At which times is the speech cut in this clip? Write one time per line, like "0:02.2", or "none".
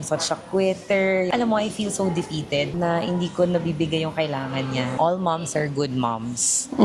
0:01.3
0:04.9

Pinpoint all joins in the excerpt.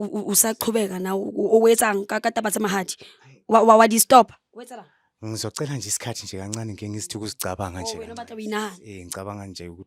none

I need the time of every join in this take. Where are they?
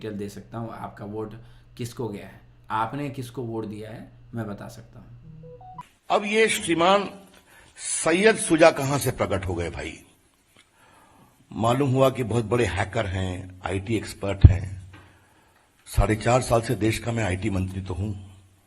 0:05.9

